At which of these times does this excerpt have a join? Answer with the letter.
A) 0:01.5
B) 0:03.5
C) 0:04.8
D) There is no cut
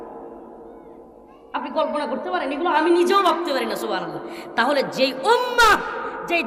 D